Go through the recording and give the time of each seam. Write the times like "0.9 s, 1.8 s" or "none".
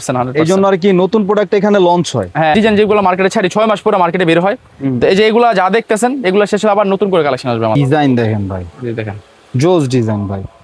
2.5 s, 7.8 s